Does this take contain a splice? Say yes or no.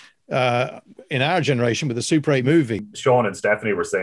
yes